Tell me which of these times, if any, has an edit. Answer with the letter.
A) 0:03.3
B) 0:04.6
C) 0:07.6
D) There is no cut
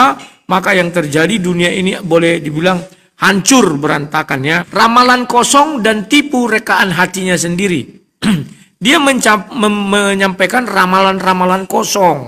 B